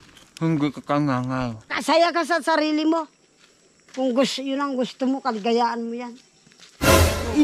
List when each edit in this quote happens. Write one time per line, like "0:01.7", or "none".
0:01.6